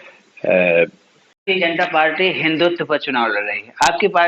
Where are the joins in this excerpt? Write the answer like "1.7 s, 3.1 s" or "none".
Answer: 1.4 s